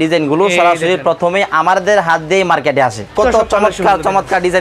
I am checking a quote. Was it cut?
yes; 1 cut; at 3.1 s

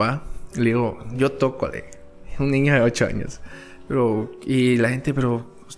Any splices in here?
no; 0 cuts

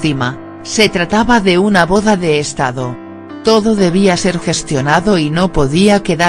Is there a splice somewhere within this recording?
yes; 1 cut; at 3.6 s

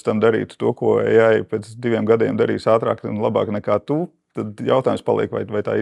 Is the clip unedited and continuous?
yes; 0 cuts

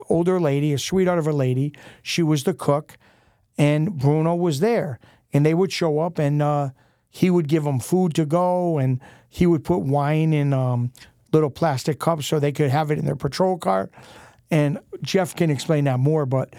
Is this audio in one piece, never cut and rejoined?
yes; 0 cuts

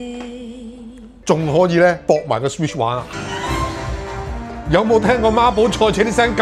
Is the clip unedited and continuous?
no; 1 cut; at 3.1 s

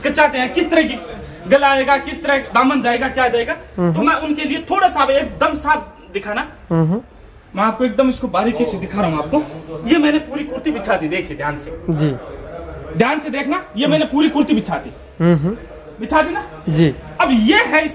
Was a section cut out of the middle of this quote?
no; 0 cuts

